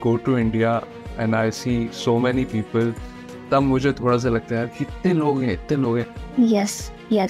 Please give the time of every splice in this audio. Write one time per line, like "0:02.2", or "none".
0:06.2